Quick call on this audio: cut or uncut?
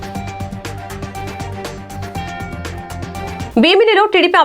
cut